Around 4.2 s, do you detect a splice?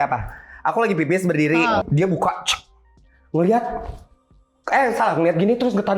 no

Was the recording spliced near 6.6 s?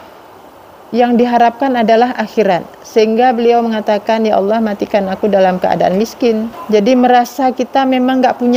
yes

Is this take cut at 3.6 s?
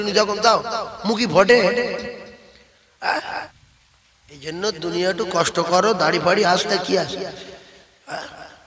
yes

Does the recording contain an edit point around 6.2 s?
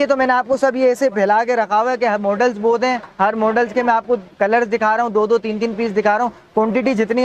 no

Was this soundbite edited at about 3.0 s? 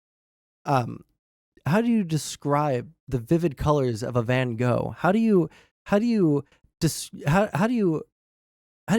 no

